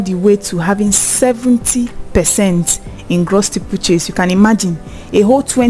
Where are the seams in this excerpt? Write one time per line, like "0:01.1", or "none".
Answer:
none